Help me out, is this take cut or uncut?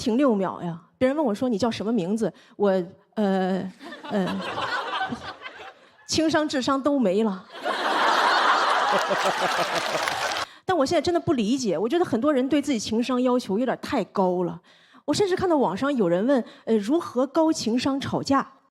cut